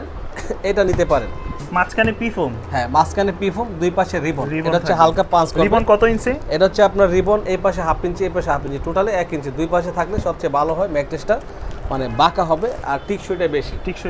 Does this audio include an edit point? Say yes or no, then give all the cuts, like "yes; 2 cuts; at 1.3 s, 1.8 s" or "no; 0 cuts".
no; 0 cuts